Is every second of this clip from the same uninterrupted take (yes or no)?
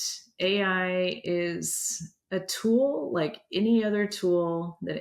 yes